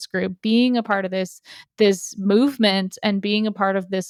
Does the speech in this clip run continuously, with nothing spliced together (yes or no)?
yes